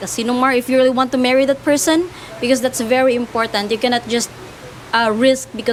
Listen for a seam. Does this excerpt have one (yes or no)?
no